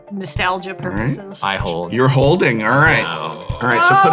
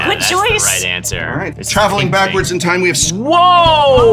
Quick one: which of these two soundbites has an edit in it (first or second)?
second